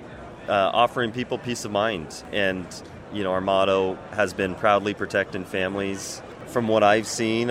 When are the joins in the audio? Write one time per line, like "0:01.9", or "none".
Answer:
0:02.2
0:06.5